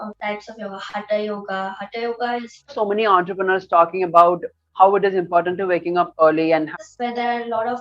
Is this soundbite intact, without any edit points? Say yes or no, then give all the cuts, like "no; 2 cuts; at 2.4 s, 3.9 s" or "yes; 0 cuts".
no; 2 cuts; at 2.7 s, 6.7 s